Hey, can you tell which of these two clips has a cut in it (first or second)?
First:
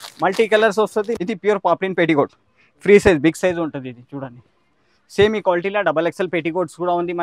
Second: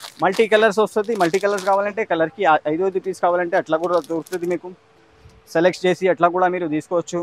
first